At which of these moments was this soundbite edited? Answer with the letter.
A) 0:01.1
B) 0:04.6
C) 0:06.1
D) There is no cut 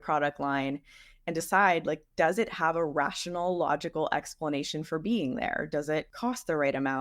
C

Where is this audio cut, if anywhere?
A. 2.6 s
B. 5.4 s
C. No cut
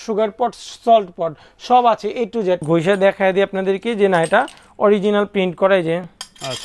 A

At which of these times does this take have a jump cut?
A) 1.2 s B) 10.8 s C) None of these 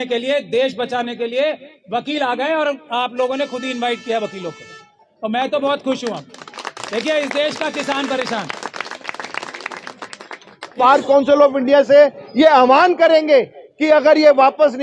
B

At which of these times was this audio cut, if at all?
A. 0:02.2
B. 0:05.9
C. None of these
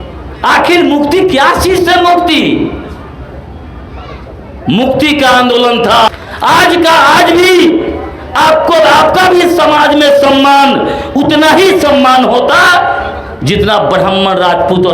B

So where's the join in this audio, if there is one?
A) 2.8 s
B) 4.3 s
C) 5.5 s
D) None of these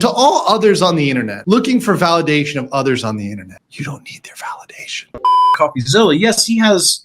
C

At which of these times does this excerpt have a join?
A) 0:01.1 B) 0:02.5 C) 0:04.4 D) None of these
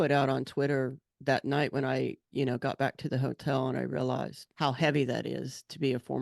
C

